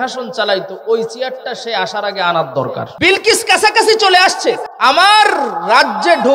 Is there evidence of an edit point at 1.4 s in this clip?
no; 2 cuts; at 2.9 s, 4.7 s

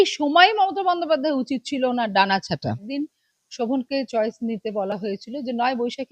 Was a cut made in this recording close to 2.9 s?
yes; 1 cut; at 2.9 s

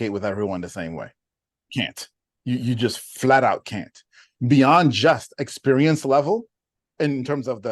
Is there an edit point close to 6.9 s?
yes; 2 cuts; at 1.9 s, 6.9 s

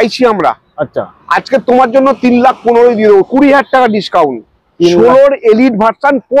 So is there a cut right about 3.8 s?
no; 0 cuts

